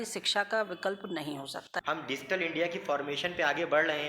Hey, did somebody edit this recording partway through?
yes; 1 cut; at 1.7 s

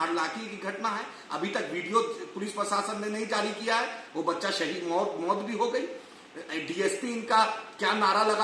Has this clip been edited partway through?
no; 0 cuts

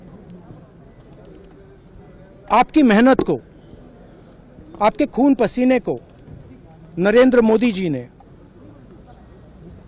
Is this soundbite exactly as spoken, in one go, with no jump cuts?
yes; 0 cuts

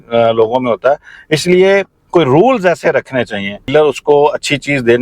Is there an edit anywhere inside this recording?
yes; 1 cut; at 3.7 s

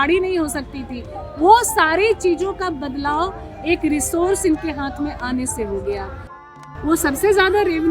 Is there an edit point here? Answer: yes; 1 cut; at 6.5 s

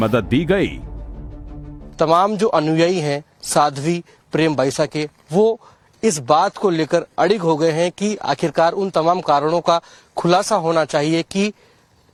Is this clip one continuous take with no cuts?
yes; 0 cuts

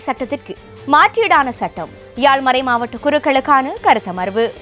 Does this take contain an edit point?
no; 0 cuts

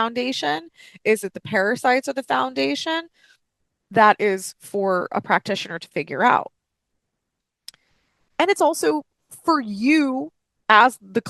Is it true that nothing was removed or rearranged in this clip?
yes; 0 cuts

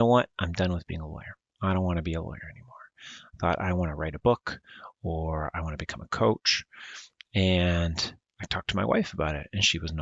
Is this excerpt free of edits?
yes; 0 cuts

